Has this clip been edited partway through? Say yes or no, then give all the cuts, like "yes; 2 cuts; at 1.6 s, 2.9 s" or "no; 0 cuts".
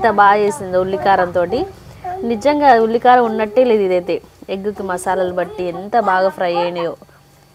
no; 0 cuts